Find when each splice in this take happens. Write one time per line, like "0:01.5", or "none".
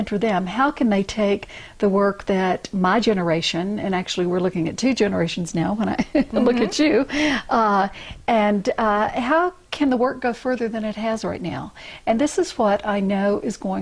0:12.1